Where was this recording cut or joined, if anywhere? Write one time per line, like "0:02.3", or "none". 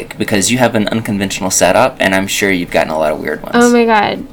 0:03.4